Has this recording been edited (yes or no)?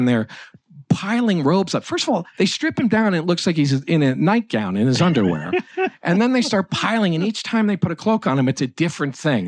no